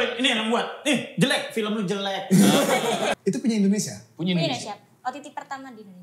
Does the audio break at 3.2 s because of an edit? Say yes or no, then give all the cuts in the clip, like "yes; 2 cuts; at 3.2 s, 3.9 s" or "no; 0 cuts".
yes; 1 cut; at 3.2 s